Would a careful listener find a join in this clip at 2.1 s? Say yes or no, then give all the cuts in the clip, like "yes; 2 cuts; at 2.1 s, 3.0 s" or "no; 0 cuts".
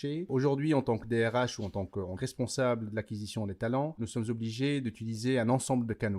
yes; 1 cut; at 2.1 s